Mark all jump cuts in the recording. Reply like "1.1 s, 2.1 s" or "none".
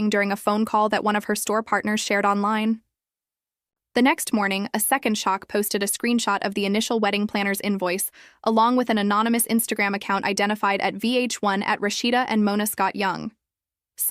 12.7 s